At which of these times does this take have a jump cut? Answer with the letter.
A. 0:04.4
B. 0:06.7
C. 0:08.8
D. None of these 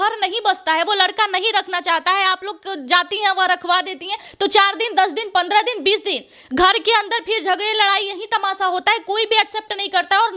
D